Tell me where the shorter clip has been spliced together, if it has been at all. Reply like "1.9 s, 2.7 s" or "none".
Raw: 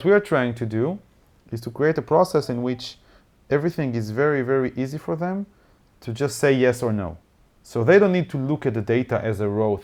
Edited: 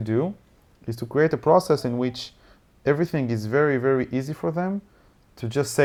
none